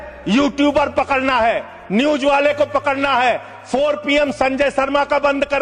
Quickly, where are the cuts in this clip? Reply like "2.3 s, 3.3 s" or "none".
none